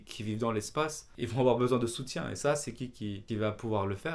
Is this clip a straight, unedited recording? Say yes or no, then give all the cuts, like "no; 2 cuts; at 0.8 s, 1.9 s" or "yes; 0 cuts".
no; 2 cuts; at 1.1 s, 3.2 s